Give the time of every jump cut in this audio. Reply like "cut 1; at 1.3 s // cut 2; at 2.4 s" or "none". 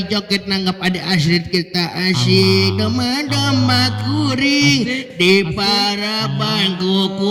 none